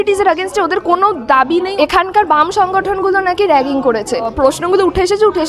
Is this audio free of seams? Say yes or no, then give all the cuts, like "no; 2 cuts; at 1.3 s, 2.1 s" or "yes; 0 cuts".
no; 2 cuts; at 1.7 s, 4.3 s